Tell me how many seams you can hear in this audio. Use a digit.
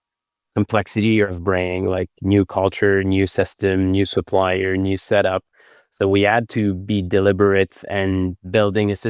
1